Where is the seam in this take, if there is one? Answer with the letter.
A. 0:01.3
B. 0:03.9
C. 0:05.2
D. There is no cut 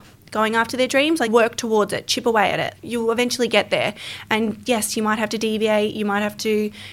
A